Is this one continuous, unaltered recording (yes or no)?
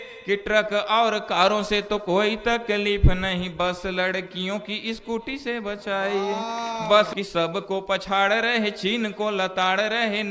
no